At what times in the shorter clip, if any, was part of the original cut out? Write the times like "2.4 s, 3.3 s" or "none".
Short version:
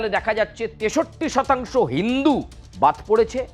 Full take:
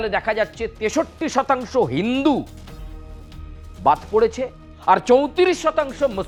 2.6 s